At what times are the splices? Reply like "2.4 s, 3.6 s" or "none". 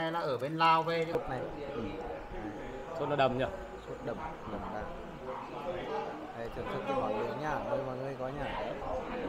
1.1 s